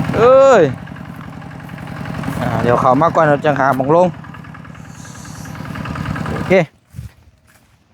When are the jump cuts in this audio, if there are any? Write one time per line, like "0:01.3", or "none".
0:06.5